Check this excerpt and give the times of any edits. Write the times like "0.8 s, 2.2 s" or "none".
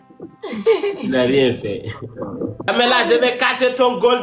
2.7 s